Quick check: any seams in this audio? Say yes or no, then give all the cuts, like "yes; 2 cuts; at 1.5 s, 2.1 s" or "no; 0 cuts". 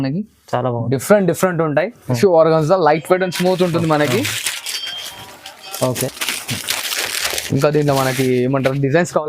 yes; 1 cut; at 2.2 s